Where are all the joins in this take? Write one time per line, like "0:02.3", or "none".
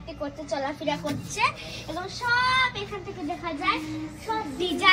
none